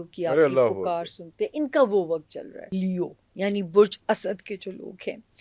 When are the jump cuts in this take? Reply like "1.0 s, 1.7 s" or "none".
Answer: 2.7 s